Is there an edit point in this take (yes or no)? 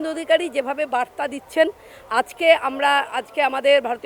no